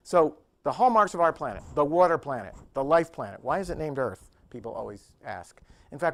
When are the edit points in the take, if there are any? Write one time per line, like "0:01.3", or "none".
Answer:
none